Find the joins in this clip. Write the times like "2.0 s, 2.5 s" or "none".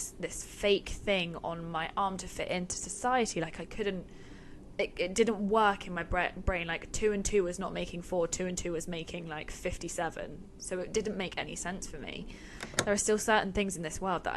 12.6 s